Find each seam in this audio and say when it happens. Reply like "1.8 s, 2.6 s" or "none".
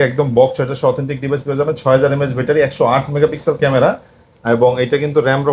none